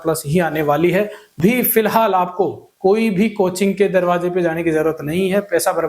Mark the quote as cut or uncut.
cut